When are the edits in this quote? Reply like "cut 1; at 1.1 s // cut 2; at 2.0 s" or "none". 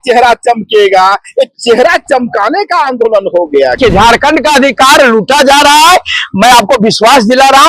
cut 1; at 3.8 s

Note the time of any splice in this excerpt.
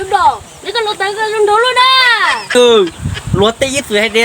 cut 1; at 2.5 s

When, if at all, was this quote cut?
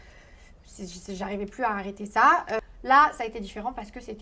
cut 1; at 2.6 s

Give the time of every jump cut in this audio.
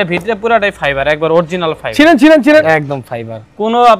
cut 1; at 2.6 s

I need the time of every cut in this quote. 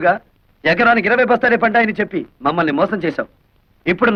none

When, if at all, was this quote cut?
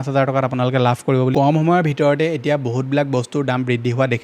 cut 1; at 1.3 s

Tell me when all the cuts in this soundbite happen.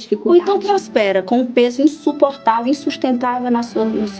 none

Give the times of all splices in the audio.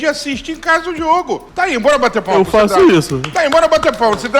cut 1; at 1.5 s

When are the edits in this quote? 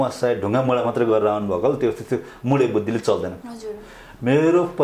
cut 1; at 3.3 s

